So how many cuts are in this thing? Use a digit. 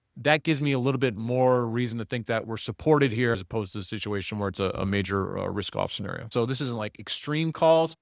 2